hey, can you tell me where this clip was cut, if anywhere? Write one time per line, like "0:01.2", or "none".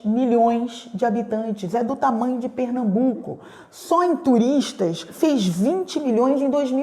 0:05.1